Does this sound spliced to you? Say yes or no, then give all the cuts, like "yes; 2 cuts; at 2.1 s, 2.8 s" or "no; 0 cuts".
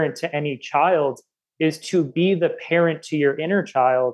no; 0 cuts